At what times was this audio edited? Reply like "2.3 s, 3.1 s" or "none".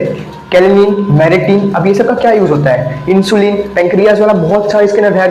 none